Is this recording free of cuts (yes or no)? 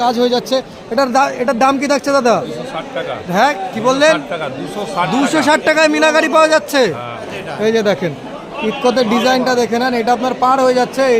no